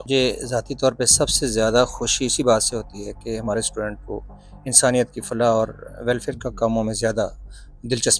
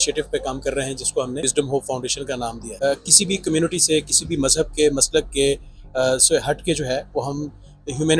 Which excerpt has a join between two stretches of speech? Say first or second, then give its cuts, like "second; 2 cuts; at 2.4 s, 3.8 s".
second; 2 cuts; at 1.4 s, 2.6 s